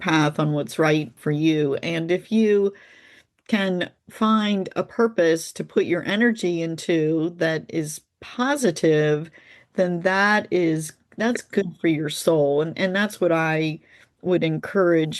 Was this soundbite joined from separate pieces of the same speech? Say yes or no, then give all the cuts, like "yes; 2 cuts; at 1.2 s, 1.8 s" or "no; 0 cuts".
yes; 1 cut; at 1.2 s